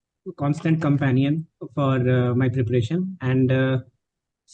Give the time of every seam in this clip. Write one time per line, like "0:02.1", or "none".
none